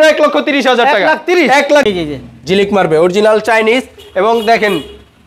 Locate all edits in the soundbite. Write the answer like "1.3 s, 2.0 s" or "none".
1.8 s

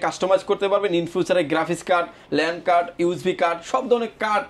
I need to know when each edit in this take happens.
none

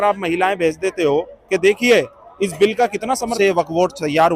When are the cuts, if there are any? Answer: 3.3 s

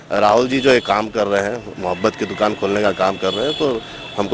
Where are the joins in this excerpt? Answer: none

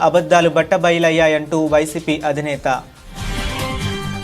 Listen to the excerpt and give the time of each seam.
none

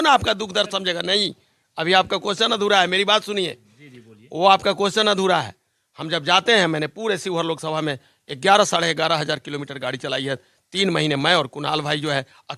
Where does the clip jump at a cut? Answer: none

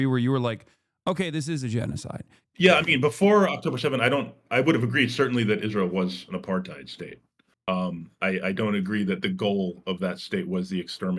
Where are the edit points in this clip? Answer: 2.3 s

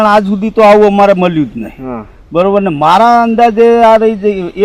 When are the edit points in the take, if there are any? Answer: none

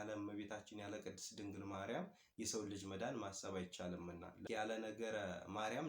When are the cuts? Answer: 4.4 s

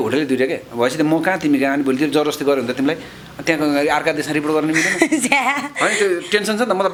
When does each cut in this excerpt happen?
none

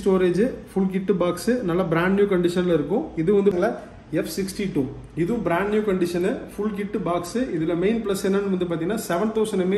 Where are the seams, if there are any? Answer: 3.5 s

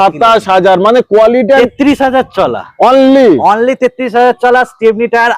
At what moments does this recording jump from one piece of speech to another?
1.7 s

